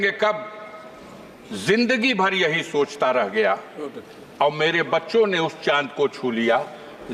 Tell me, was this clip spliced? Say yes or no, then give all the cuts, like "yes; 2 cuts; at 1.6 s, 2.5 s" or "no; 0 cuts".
no; 0 cuts